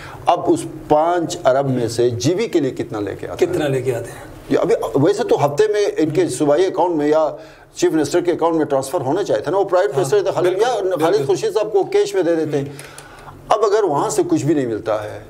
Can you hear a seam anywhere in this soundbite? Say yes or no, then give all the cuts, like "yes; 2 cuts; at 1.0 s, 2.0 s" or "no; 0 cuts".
no; 0 cuts